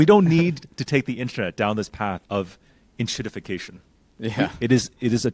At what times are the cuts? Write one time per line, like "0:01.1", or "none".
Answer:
0:02.2